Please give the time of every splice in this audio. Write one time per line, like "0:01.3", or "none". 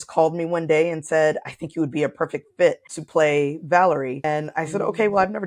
0:02.9
0:04.2